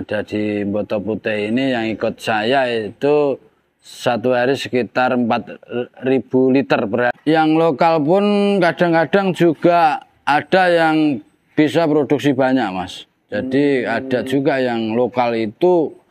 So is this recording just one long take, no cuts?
no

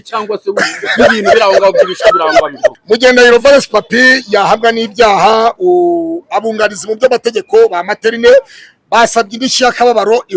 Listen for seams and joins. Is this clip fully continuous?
no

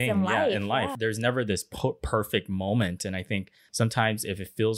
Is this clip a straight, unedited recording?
no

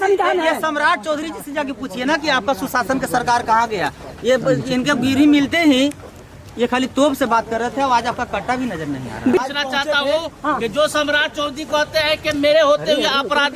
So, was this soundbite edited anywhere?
yes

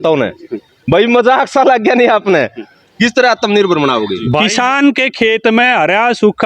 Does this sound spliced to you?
yes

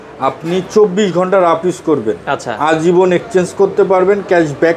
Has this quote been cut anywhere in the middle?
no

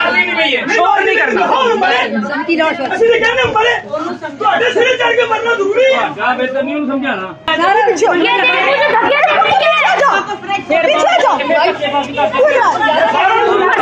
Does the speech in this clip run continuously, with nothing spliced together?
no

